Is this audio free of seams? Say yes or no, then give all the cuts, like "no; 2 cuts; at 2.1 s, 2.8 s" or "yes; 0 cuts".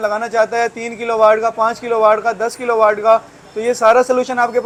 yes; 0 cuts